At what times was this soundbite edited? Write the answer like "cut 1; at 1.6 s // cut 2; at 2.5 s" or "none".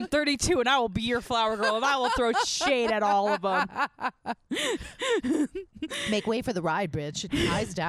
none